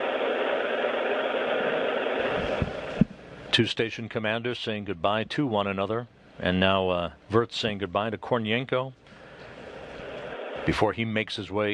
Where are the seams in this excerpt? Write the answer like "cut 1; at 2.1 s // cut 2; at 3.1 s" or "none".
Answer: none